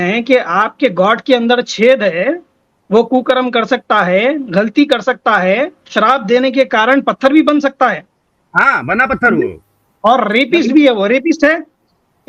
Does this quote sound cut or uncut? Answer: uncut